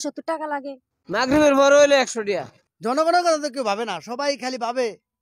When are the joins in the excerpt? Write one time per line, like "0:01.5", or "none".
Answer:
0:00.9
0:02.5